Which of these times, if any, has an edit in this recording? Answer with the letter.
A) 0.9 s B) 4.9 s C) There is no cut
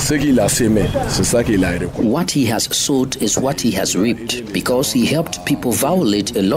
A